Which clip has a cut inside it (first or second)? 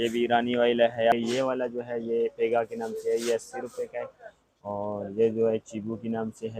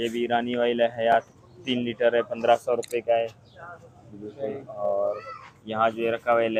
first